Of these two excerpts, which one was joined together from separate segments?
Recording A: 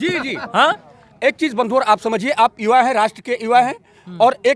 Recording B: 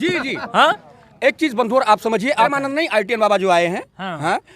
B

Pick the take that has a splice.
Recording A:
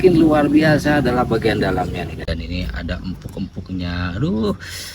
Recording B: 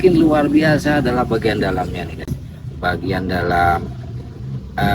A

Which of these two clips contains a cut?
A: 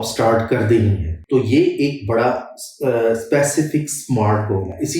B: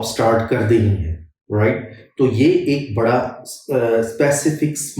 A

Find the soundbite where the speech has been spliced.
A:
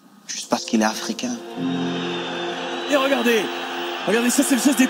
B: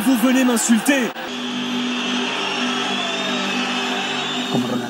B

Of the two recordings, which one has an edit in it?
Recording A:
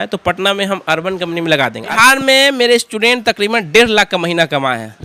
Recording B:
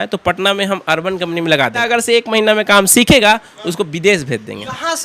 A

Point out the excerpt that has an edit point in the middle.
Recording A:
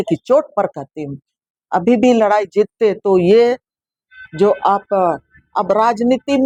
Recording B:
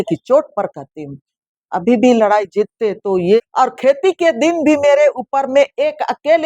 B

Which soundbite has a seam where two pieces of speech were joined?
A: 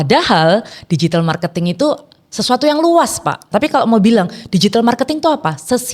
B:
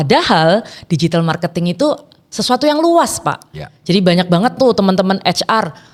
A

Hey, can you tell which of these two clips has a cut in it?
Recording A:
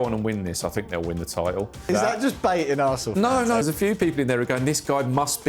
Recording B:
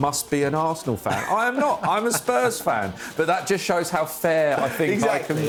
A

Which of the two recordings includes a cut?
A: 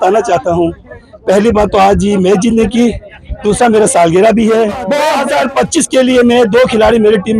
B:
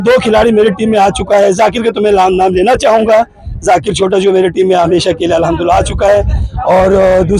A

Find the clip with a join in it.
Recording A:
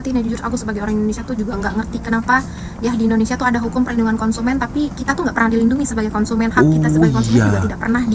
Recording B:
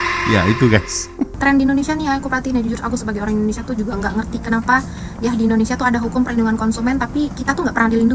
B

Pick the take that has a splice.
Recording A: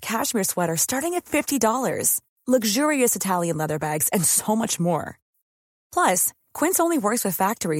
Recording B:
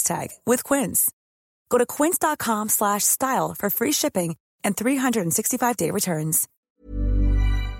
B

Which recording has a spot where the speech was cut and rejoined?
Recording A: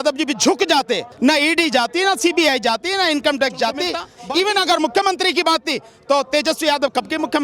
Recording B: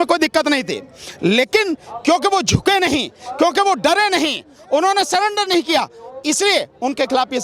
A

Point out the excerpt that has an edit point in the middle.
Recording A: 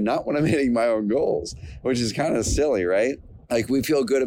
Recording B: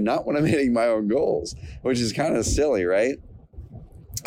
A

